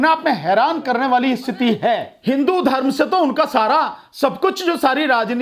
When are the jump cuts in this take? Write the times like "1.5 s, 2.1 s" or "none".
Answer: 2.1 s